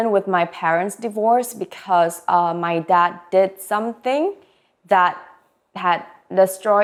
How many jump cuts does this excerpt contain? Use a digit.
0